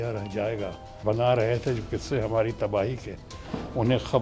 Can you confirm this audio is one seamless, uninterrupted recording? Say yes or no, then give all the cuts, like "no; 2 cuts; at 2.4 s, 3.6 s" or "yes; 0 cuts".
no; 1 cut; at 1.0 s